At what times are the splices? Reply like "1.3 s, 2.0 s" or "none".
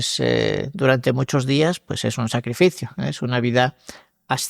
none